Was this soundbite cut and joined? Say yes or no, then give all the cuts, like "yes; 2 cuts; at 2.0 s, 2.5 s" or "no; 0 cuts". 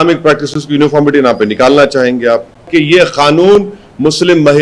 yes; 1 cut; at 2.7 s